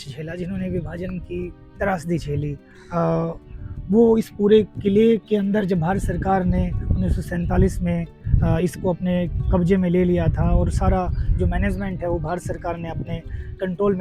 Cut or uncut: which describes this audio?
uncut